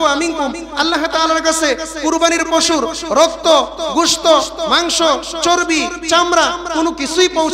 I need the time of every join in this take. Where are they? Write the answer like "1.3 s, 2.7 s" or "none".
none

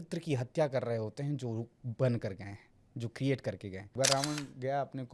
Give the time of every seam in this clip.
3.9 s

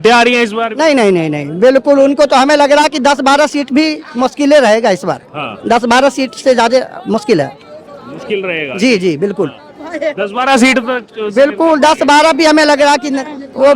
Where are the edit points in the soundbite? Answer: none

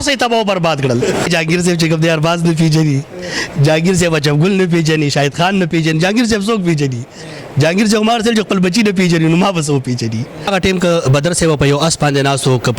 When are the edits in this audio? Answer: 1.3 s, 10.5 s

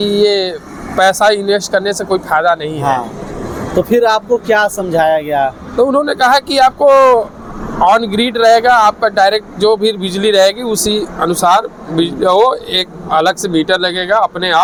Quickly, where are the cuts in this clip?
none

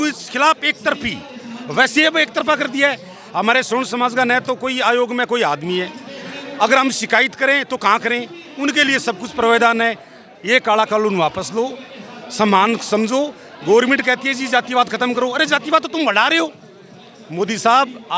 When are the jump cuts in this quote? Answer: none

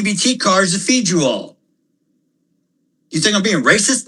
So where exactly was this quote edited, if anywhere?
1.6 s

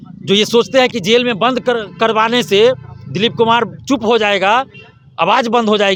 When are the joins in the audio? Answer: none

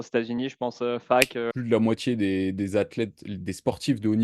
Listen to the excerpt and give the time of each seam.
1.5 s

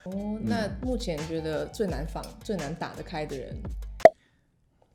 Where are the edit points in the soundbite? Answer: none

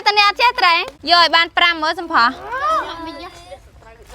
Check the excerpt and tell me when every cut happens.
0.9 s

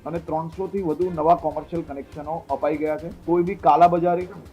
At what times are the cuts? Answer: 3.1 s

